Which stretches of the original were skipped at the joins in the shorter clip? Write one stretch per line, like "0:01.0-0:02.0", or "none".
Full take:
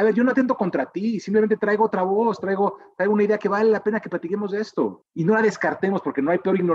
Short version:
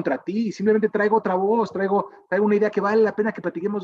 none